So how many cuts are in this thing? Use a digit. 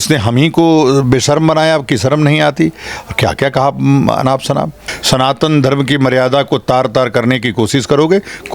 1